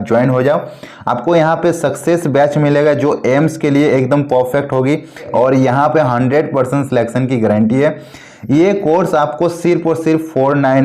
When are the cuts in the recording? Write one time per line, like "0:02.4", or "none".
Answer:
0:05.3